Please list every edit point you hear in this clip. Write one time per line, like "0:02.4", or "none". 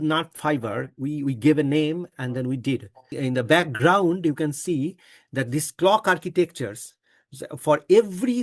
0:03.1